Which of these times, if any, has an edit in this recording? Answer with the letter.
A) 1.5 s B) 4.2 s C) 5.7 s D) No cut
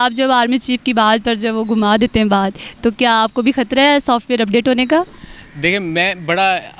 D